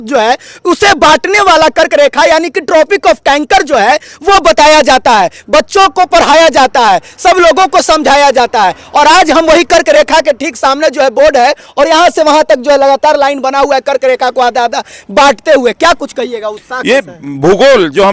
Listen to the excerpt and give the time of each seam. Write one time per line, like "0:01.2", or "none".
none

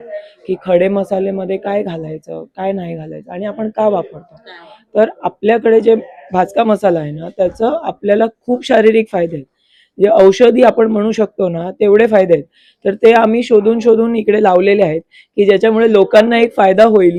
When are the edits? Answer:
none

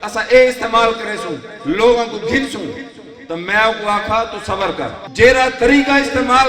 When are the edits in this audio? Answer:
0:05.0

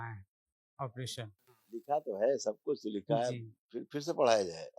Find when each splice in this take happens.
0:01.8

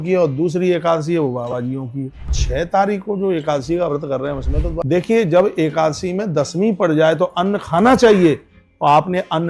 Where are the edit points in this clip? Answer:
0:02.4
0:04.8

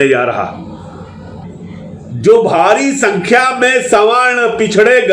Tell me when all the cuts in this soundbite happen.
0:01.5

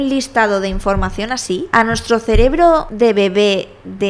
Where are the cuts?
0:01.7
0:02.9

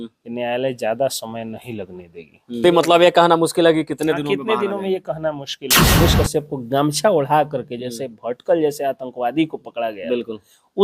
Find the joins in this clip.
0:02.6
0:06.0

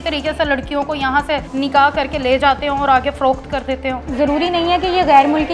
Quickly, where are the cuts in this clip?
0:01.5
0:04.0

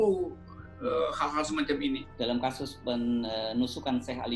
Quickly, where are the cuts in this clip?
0:02.1

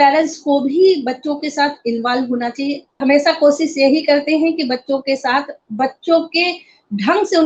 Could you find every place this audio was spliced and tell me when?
0:02.9

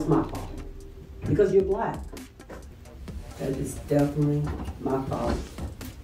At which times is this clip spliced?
0:02.6

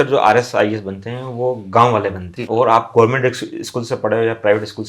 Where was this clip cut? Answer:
0:02.3

